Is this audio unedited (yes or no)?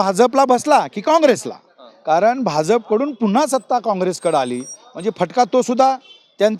yes